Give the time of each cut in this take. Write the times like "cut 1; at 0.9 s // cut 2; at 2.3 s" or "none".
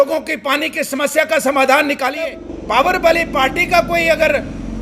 cut 1; at 2.5 s